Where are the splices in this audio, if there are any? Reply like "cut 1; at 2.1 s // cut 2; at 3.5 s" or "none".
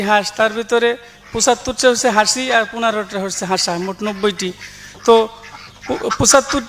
none

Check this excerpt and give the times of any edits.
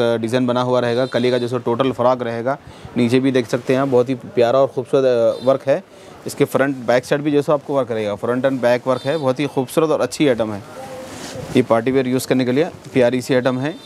none

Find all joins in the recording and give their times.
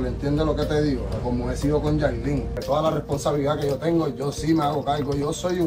cut 1; at 2.5 s

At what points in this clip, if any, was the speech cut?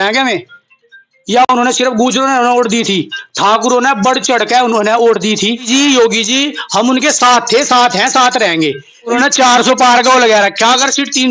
cut 1; at 5.7 s // cut 2; at 9.2 s

